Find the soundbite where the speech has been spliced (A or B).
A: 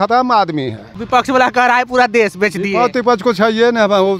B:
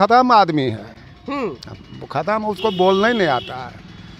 A